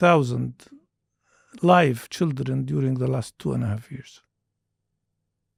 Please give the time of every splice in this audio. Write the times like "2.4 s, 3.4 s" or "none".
none